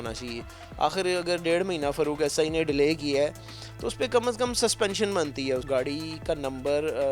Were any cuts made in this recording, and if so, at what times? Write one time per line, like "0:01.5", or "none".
0:05.6